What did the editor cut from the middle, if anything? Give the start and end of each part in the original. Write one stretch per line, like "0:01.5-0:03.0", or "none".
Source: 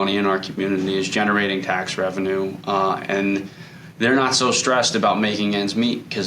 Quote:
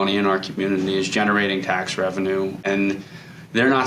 0:02.6-0:03.0